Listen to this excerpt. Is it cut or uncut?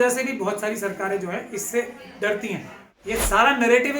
cut